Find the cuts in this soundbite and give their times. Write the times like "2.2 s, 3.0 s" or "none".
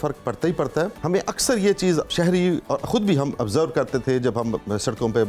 1.0 s, 2.1 s